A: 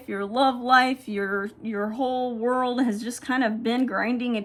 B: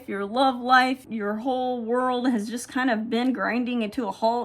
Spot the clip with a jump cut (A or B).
B